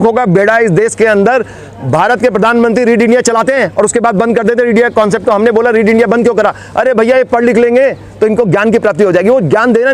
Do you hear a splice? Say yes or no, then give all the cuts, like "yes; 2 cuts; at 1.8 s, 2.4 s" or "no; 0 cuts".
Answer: no; 0 cuts